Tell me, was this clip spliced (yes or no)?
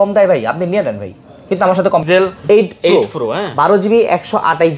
yes